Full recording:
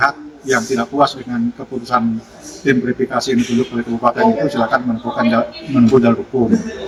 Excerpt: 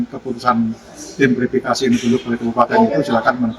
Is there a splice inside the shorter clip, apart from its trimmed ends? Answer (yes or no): no